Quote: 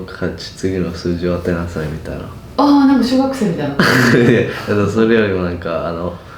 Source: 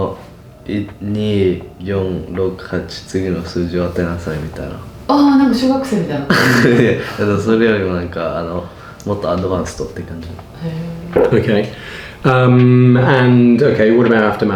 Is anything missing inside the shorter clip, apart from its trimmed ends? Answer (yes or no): no